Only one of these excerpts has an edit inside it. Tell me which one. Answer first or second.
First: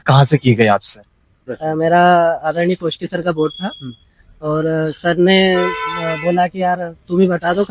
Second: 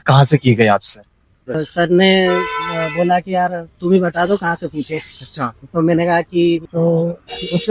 second